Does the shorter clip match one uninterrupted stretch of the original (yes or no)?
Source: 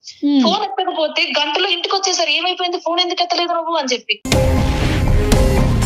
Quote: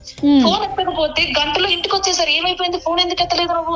yes